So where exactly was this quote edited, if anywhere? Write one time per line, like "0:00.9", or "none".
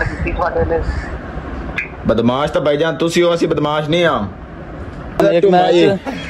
0:05.2